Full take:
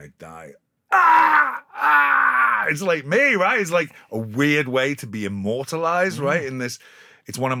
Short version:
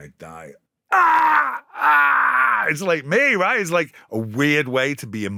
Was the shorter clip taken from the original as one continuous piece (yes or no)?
yes